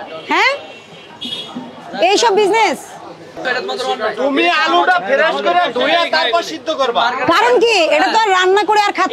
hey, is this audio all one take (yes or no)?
no